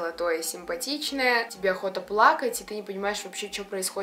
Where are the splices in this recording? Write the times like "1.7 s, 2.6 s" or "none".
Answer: 1.5 s